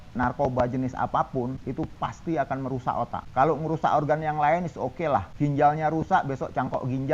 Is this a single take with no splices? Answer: no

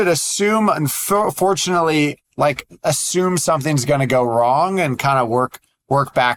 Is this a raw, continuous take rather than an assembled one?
yes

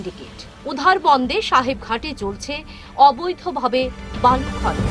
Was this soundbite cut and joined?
no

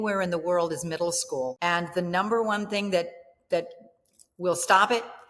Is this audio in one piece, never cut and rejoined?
no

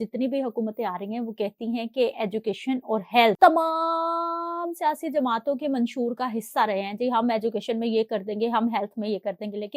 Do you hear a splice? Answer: yes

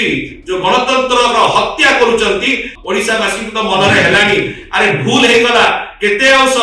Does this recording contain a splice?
yes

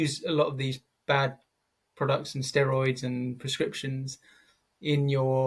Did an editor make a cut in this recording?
no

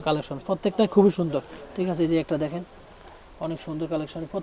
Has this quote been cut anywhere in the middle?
no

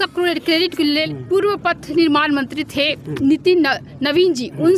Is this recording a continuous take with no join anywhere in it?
no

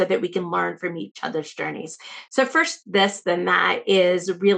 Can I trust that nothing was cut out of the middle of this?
yes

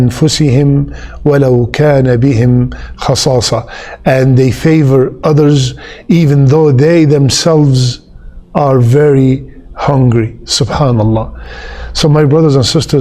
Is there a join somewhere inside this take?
no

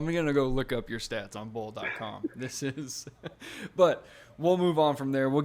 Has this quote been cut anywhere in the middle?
no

